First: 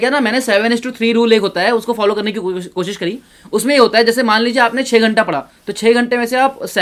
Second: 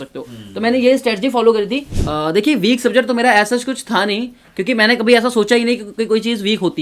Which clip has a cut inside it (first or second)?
second